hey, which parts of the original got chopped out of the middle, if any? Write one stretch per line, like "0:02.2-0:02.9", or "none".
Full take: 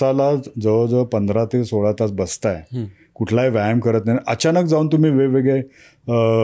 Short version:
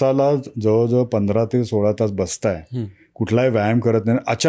none